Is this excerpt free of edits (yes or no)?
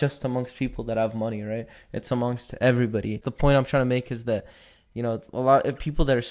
yes